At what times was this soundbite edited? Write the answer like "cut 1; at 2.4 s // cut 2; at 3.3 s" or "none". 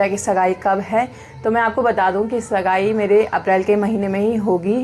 none